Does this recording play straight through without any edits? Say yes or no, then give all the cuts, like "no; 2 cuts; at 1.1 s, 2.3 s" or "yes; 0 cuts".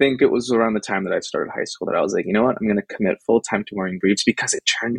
yes; 0 cuts